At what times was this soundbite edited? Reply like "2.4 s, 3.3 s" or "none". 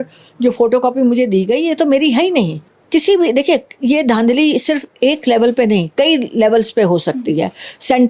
2.7 s